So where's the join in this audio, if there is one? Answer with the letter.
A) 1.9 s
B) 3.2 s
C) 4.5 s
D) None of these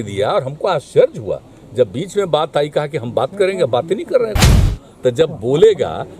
C